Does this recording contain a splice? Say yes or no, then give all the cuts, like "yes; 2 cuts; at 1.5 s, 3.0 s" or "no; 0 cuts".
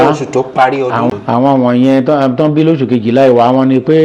yes; 1 cut; at 1.1 s